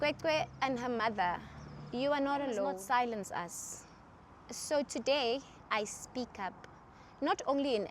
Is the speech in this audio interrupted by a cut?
yes; 1 cut; at 2.8 s

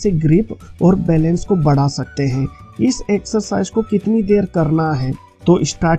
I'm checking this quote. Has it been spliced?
no; 0 cuts

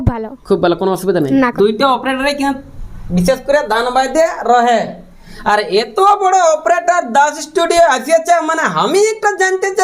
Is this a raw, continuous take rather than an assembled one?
no; 1 cut; at 1.4 s

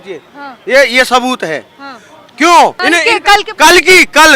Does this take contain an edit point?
yes; 1 cut; at 2.8 s

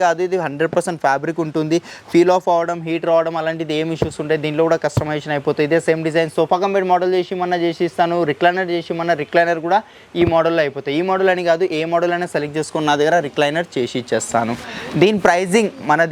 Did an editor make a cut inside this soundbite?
no; 0 cuts

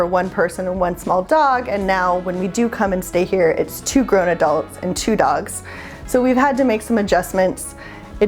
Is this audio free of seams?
yes; 0 cuts

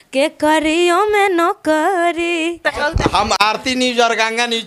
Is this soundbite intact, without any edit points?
no; 1 cut; at 2.7 s

